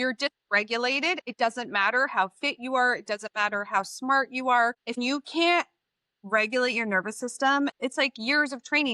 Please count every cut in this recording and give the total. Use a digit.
2